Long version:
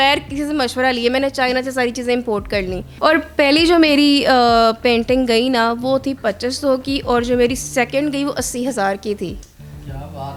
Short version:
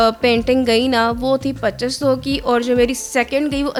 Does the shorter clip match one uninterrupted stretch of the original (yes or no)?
yes